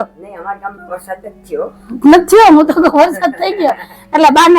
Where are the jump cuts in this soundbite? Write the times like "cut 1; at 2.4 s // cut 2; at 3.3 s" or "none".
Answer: none